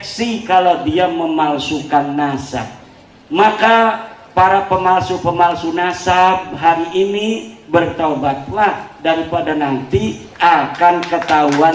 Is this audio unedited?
yes; 0 cuts

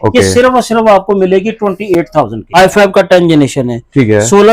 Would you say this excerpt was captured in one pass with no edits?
no; 1 cut; at 2.4 s

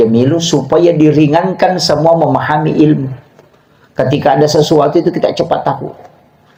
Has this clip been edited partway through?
no; 0 cuts

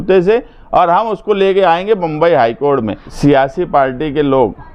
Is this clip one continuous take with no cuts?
no; 1 cut; at 3.0 s

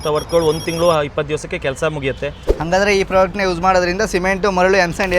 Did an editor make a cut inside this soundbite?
yes; 1 cut; at 2.4 s

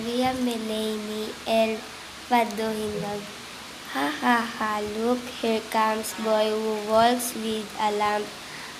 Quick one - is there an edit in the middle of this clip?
yes; 1 cut; at 7.3 s

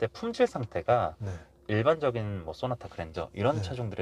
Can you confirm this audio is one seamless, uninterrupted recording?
yes; 0 cuts

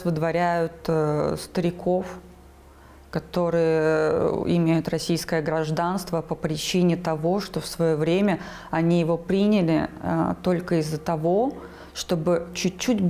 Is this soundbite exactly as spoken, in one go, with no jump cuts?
yes; 0 cuts

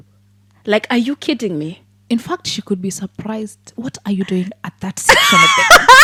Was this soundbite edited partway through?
no; 0 cuts

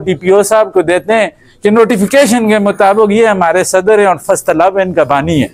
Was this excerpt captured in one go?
yes; 0 cuts

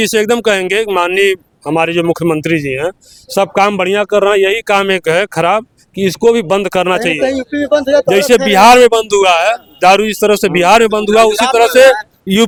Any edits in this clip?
no; 0 cuts

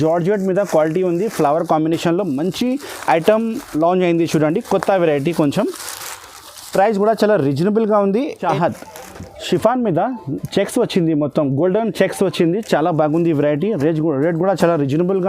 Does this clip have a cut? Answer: yes; 1 cut; at 8.5 s

